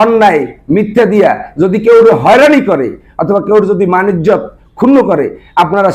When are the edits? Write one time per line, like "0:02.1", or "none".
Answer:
none